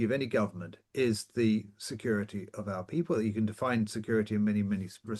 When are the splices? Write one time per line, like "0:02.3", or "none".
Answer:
none